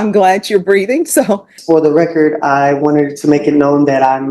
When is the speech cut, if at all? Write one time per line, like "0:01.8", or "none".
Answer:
0:01.5